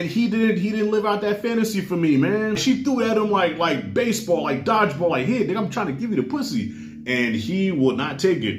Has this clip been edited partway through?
yes; 1 cut; at 2.6 s

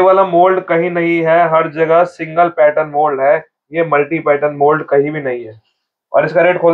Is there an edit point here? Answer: no; 0 cuts

